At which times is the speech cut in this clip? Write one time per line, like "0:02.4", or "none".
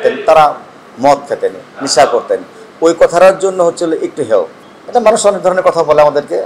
0:04.6